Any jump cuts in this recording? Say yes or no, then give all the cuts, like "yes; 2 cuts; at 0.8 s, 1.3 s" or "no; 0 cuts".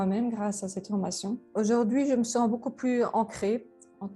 yes; 1 cut; at 1.5 s